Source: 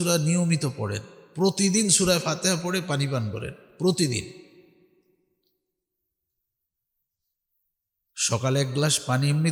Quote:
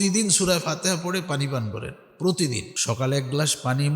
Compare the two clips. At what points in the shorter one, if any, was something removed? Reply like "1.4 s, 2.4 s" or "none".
2.7 s